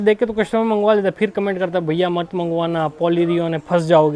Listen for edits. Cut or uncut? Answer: uncut